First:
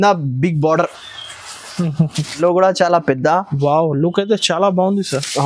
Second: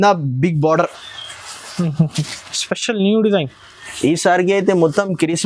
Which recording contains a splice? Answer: first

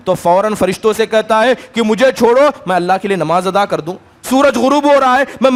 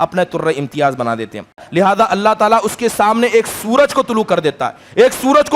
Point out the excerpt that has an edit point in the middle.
second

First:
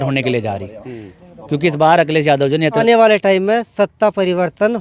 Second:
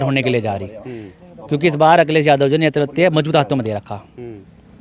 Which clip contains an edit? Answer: first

